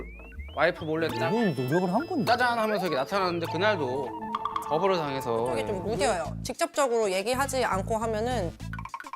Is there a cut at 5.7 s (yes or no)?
yes